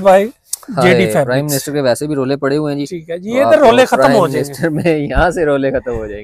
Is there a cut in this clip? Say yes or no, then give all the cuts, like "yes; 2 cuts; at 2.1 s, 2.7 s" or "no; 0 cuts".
no; 0 cuts